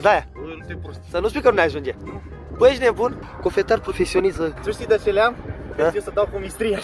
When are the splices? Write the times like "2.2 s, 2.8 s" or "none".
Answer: 3.3 s, 4.6 s